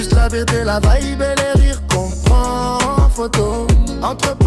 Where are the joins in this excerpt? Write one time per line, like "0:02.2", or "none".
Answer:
none